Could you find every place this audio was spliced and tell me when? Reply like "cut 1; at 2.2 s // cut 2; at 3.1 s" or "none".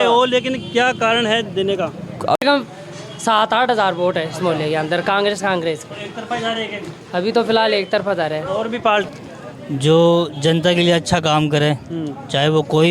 cut 1; at 2.4 s // cut 2; at 9.1 s